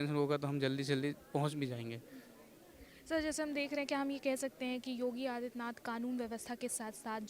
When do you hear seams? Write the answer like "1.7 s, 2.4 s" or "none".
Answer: none